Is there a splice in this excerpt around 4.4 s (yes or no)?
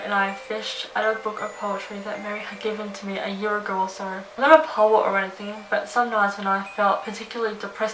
yes